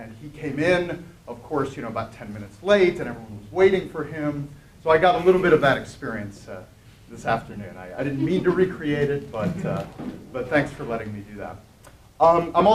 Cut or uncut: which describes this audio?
uncut